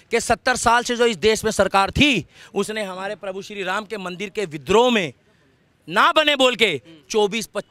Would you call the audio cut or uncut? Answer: uncut